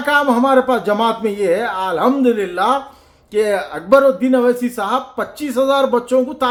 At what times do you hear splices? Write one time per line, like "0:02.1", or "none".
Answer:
none